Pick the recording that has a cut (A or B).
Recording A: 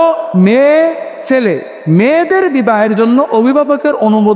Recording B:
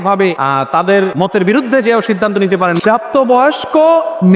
B